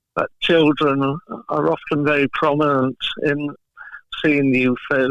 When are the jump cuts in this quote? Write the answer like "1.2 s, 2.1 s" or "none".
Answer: 3.7 s